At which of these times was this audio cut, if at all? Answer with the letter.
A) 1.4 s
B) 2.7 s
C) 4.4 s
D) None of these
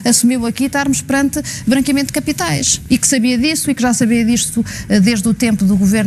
B